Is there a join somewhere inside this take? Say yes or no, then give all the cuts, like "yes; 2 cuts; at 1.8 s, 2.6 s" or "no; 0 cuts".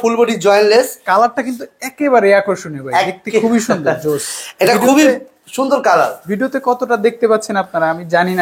no; 0 cuts